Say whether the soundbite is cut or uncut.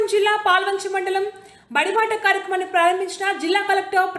uncut